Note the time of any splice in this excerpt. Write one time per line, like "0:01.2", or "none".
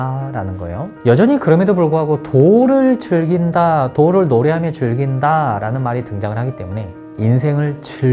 none